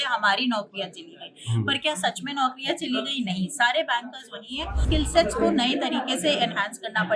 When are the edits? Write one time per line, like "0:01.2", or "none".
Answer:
0:04.8